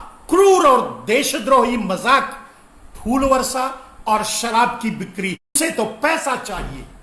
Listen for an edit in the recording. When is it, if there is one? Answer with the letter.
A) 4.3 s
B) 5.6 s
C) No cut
B